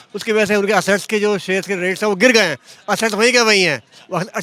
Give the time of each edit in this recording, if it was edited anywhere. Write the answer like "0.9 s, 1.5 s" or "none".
none